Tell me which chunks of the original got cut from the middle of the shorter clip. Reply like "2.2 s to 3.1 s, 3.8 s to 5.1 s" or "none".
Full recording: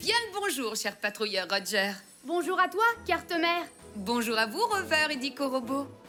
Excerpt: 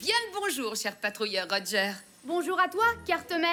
none